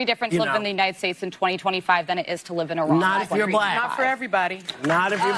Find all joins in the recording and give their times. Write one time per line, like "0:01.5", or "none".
none